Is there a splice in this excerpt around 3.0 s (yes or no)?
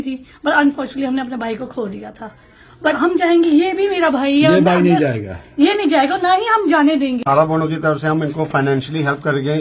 yes